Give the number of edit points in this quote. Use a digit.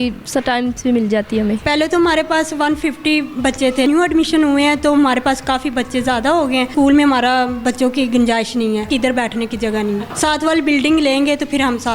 5